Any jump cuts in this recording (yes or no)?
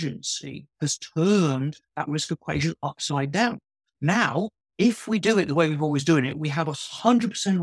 no